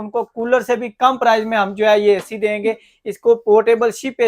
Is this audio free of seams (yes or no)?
yes